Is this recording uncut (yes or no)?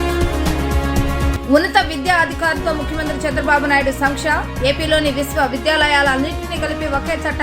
no